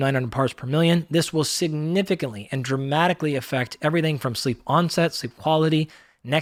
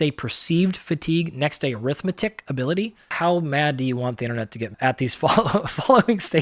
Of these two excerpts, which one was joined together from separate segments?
second; 2 cuts; at 3.1 s, 4.7 s

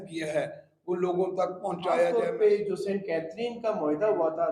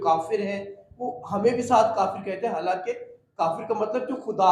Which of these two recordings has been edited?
first; 1 cut; at 2.1 s

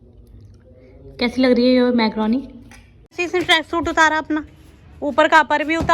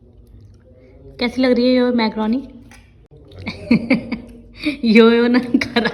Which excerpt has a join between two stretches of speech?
first; 1 cut; at 3.2 s

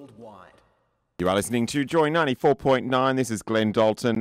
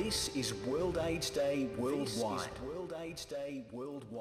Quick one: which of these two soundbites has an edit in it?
first; 1 cut; at 1.2 s

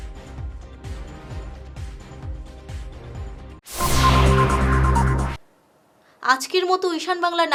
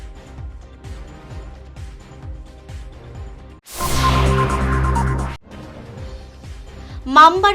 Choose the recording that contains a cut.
second; 2 cuts; at 5.3 s, 6.4 s

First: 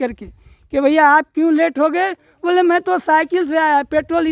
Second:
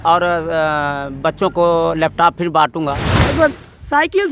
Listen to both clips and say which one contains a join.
second; 1 cut; at 3.3 s

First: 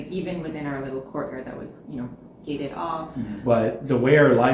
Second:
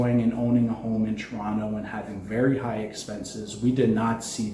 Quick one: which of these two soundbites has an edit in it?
first; 1 cut; at 3.3 s

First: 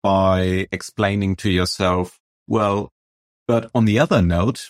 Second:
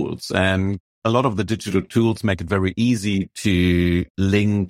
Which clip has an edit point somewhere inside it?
second; 1 cut; at 1.0 s

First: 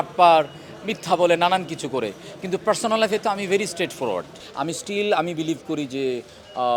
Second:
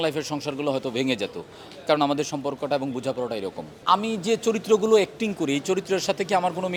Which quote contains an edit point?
first; 1 cut; at 4.4 s

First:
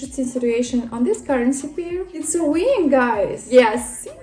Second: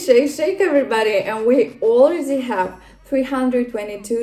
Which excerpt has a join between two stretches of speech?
first; 2 cuts; at 2.1 s, 3.4 s

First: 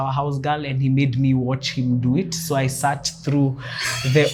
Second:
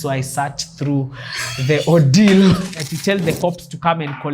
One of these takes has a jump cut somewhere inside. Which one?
second; 1 cut; at 2.8 s

